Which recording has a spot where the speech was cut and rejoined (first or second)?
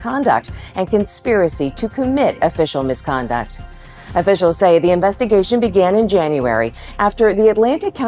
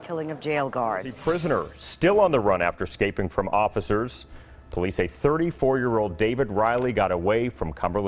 second